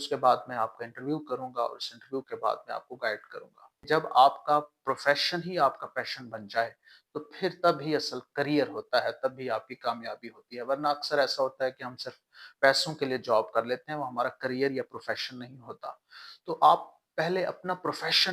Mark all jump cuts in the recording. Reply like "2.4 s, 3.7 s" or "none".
3.8 s